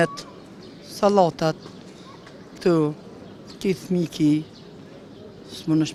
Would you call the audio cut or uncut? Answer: uncut